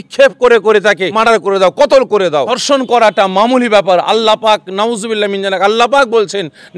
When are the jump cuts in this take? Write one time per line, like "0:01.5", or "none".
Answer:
0:01.1
0:02.6